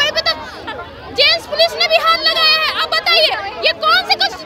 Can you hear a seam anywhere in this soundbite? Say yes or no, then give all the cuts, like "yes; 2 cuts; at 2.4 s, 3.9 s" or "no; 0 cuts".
no; 0 cuts